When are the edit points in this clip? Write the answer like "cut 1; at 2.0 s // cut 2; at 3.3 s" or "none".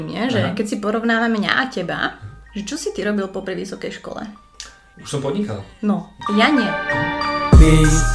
cut 1; at 6.8 s